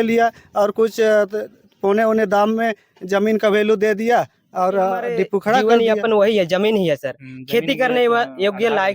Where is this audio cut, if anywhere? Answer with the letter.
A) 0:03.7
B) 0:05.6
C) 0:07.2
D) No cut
B